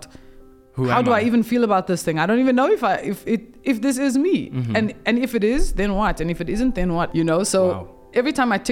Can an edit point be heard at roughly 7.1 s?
yes; 1 cut; at 7.1 s

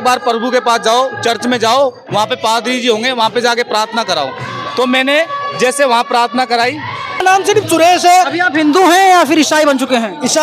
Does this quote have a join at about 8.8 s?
no; 1 cut; at 7.2 s

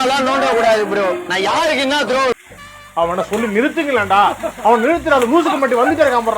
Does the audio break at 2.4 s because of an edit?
yes; 1 cut; at 2.4 s

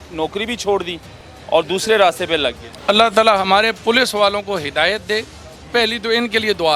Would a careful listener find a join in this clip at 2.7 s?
yes; 1 cut; at 2.7 s

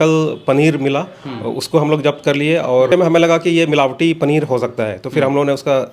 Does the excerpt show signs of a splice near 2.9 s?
yes; 1 cut; at 2.9 s

